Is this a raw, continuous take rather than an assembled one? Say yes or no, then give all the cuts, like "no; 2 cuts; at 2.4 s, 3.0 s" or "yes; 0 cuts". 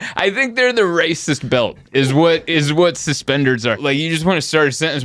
no; 1 cut; at 3.8 s